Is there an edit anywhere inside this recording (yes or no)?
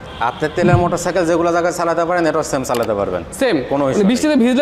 no